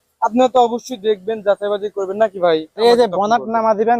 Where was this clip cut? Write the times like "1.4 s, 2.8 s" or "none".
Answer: 2.8 s